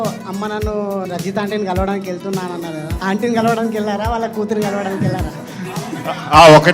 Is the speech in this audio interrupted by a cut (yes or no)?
yes